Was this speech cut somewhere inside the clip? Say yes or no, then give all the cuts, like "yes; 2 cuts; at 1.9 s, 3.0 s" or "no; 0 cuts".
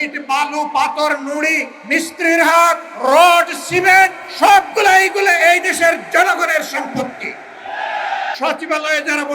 yes; 4 cuts; at 1.7 s, 2.9 s, 4.2 s, 8.4 s